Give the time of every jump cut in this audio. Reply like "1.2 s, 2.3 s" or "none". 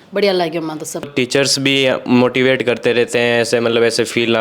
1.1 s